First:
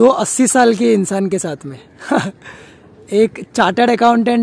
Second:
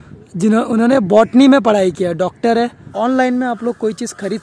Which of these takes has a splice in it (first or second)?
second